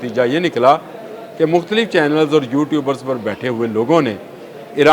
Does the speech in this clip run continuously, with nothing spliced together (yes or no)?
yes